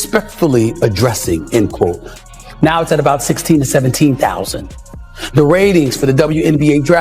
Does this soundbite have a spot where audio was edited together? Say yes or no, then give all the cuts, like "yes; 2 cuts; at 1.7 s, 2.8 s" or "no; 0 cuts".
yes; 1 cut; at 2.2 s